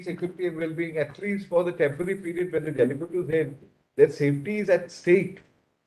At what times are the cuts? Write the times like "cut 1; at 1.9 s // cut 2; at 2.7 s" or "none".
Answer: none